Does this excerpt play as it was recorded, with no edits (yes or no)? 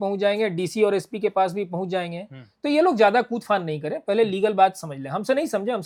yes